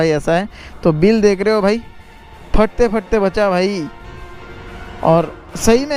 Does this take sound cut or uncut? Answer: uncut